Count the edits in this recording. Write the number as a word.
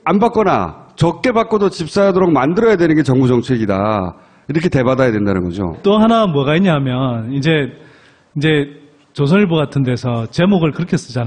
one